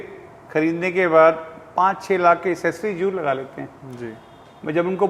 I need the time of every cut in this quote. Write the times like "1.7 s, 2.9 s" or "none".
none